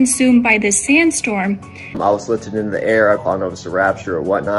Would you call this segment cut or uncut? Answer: cut